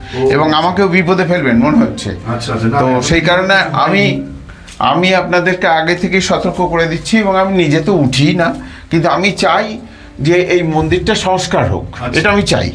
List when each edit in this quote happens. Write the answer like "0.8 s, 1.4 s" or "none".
none